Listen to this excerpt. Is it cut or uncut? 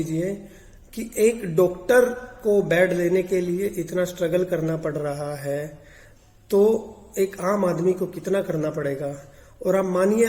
uncut